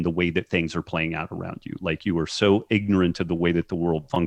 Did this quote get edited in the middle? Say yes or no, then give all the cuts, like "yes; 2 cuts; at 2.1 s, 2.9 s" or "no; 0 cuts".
no; 0 cuts